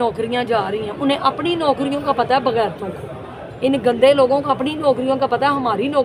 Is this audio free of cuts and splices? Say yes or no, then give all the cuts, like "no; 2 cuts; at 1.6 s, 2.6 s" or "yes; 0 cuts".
yes; 0 cuts